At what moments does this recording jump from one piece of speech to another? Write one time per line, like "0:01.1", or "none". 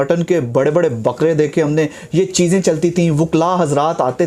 none